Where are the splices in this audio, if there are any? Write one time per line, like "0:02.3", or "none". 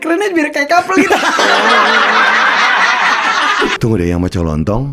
0:03.7